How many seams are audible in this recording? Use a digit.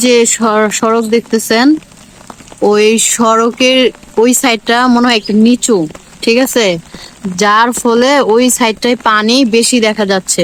0